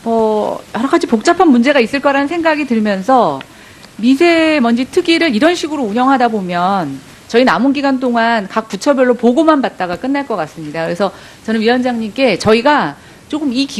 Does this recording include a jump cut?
no; 0 cuts

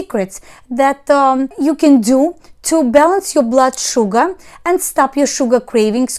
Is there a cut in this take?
yes; 1 cut; at 1.5 s

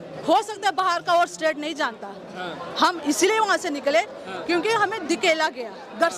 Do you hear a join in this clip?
no; 0 cuts

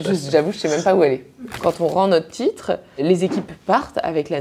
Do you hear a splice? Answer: yes; 2 cuts; at 1.5 s, 3.0 s

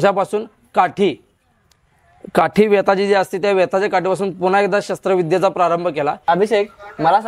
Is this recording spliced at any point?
yes; 1 cut; at 6.2 s

